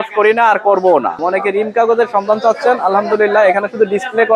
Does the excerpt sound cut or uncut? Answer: cut